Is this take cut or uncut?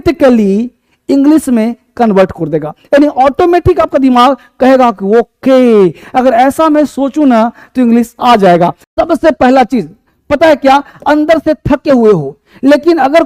cut